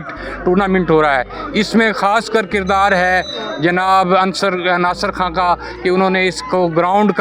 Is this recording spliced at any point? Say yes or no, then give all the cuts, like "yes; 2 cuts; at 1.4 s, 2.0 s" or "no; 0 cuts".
no; 0 cuts